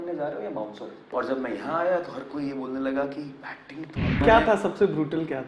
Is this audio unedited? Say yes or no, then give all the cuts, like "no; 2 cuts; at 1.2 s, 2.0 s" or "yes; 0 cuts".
no; 2 cuts; at 1.1 s, 4.2 s